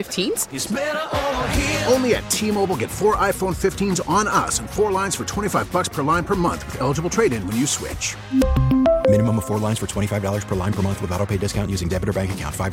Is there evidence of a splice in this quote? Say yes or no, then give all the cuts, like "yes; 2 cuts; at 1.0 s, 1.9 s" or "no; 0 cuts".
no; 0 cuts